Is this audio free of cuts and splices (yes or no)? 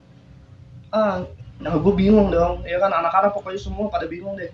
no